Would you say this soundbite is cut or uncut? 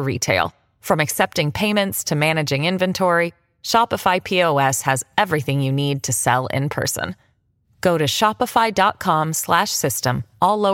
uncut